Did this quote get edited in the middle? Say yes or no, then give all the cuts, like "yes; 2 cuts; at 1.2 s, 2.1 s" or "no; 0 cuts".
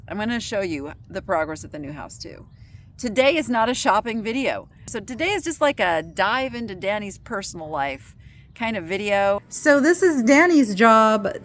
yes; 2 cuts; at 4.9 s, 9.5 s